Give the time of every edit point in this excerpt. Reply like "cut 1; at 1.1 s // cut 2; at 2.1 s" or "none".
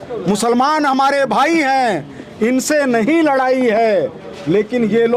none